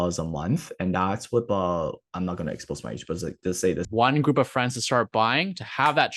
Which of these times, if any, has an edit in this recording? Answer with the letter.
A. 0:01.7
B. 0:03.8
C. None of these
B